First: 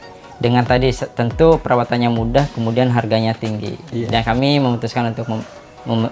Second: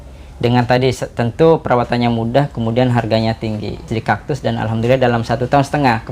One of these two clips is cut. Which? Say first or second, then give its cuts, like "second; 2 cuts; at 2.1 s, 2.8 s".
second; 1 cut; at 3.9 s